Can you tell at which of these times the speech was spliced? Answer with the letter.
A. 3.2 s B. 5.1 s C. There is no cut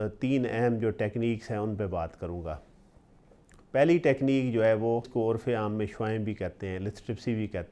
B